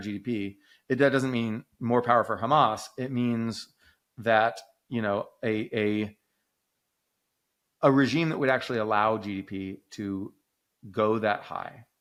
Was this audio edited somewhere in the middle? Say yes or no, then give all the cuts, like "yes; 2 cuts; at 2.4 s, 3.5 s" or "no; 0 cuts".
no; 0 cuts